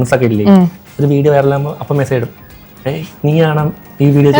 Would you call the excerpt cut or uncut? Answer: uncut